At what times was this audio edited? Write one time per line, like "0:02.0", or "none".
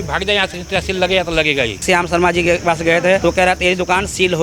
0:01.8
0:03.2